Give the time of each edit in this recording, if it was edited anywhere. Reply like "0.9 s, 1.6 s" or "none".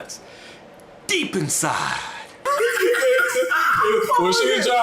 2.4 s